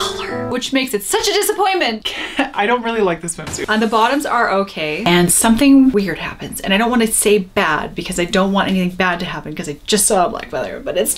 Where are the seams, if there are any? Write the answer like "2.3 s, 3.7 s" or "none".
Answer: 5.0 s